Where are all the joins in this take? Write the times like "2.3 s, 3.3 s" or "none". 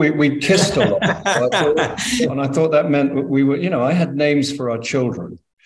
2.4 s